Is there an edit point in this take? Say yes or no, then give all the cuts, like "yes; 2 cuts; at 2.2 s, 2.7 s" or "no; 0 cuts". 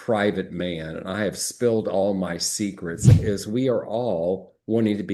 yes; 1 cut; at 3.2 s